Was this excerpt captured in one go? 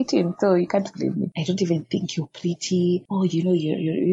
no; 2 cuts; at 1.3 s, 3.1 s

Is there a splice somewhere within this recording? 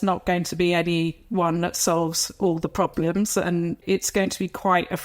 yes; 1 cut; at 3.8 s

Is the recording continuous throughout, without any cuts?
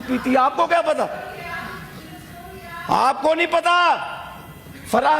yes; 0 cuts

